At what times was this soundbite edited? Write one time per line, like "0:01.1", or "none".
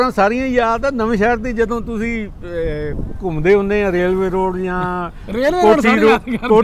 none